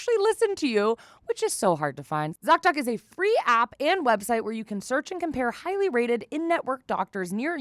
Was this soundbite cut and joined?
yes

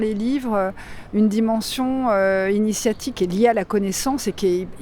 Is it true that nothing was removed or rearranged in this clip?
no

